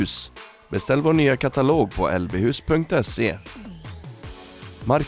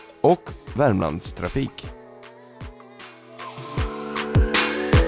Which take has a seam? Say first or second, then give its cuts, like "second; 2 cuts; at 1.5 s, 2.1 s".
second; 1 cut; at 1.7 s